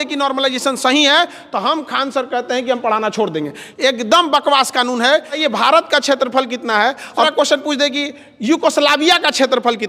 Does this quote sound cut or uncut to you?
cut